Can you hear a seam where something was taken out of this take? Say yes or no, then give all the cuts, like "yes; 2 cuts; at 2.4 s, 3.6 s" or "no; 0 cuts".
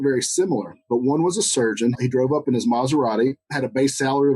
yes; 2 cuts; at 2.0 s, 3.5 s